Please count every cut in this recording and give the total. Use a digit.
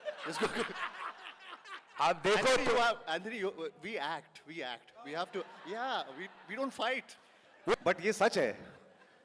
1